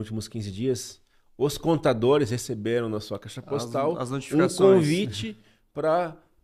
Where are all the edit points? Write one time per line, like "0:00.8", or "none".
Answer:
none